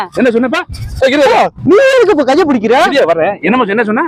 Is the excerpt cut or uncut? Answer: uncut